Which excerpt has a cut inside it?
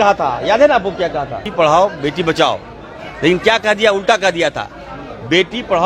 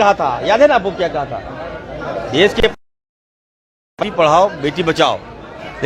first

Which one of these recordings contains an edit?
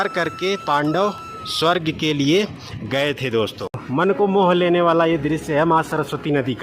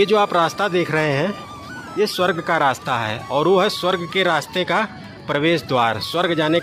first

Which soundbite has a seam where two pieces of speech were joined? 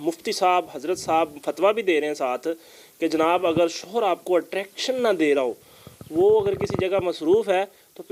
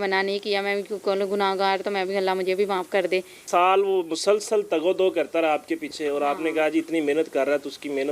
second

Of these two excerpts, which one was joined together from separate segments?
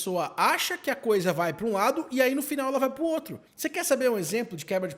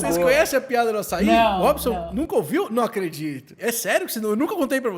second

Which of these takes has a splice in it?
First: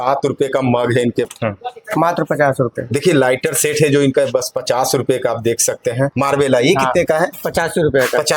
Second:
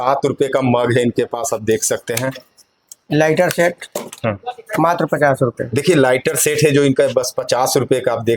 first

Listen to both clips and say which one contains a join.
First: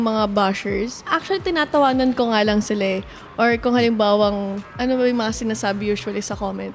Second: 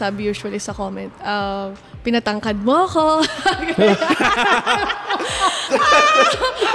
first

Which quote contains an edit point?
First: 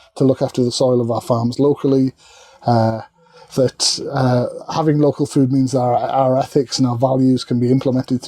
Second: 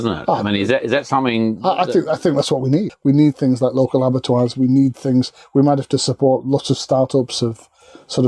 second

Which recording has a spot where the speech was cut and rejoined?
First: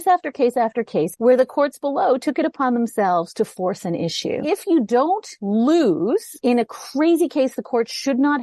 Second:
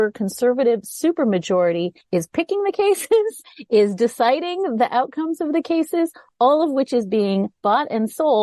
first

